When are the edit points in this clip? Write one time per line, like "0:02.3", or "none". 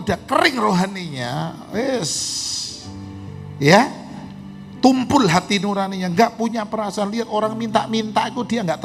none

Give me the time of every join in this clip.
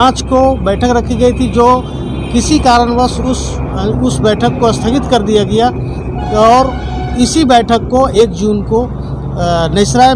none

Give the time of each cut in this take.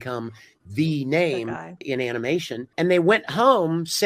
0:01.8
0:02.6

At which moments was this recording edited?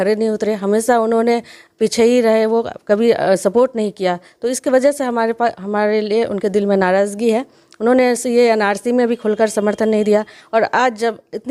none

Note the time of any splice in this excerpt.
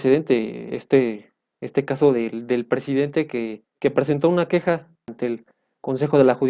0:03.6
0:05.1

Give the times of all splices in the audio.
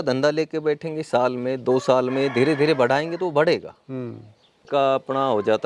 0:04.6

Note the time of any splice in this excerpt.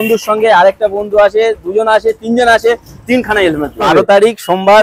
0:03.8

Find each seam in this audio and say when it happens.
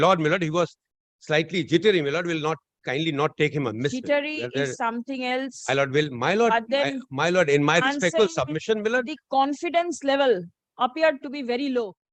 none

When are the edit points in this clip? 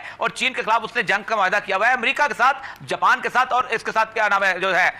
none

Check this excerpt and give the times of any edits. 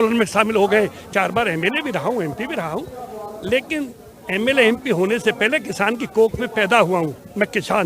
0:01.0

